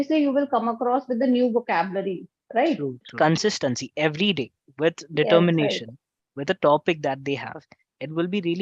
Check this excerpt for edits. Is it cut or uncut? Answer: cut